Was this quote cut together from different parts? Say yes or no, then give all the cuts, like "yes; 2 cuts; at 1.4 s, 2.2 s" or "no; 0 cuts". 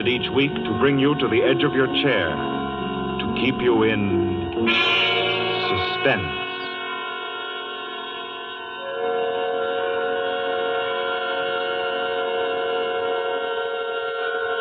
no; 0 cuts